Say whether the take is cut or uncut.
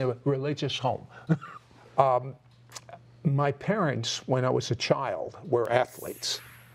cut